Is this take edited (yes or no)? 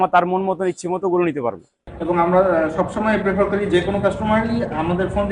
yes